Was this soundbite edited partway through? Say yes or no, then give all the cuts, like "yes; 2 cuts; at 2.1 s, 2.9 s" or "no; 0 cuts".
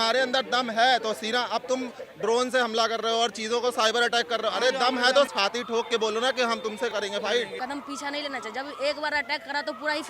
yes; 3 cuts; at 5.3 s, 6.9 s, 7.5 s